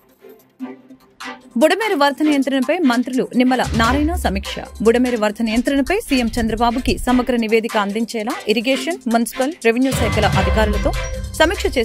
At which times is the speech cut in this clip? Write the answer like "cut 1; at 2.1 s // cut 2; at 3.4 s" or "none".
cut 1; at 1.4 s